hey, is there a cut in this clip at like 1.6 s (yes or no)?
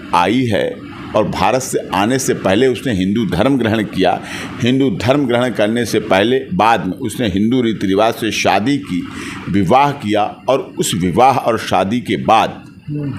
no